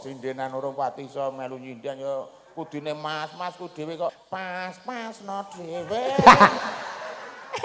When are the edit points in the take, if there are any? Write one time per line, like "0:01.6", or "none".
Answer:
0:04.2